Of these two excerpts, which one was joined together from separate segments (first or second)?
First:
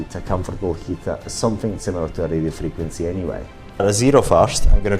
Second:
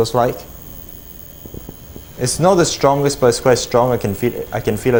first